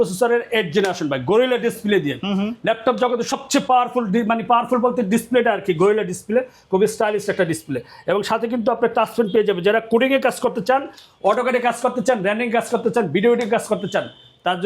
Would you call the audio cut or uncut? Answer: uncut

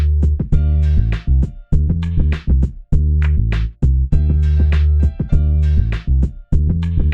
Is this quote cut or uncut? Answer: cut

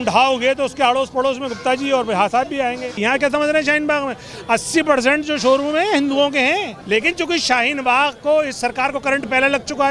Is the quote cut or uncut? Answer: cut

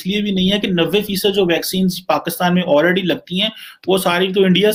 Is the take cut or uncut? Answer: uncut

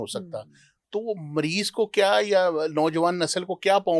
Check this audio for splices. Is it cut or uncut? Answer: uncut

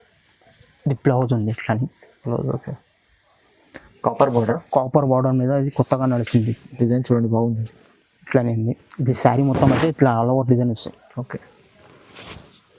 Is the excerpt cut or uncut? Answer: uncut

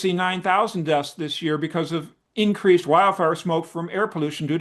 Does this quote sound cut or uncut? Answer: uncut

